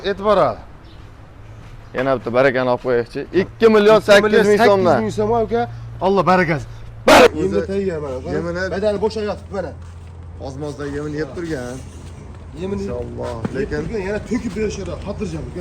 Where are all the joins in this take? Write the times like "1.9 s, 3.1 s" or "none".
7.3 s

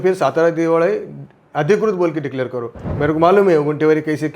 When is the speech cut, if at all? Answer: 2.9 s

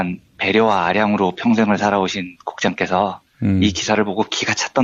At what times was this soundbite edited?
none

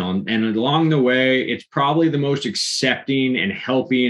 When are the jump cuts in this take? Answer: none

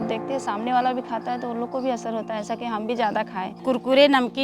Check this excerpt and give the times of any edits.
3.5 s

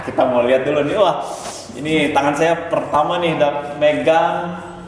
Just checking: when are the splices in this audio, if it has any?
none

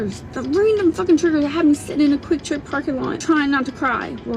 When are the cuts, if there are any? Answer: 3.2 s

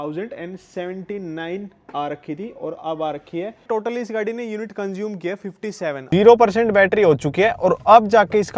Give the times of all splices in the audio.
3.6 s, 6.0 s

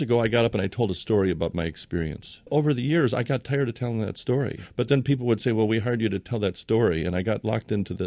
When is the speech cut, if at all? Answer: 2.5 s, 4.6 s

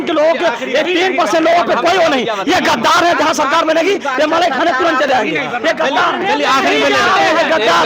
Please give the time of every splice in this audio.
none

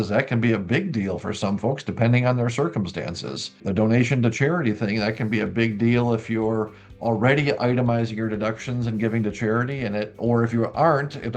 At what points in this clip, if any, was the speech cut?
3.6 s

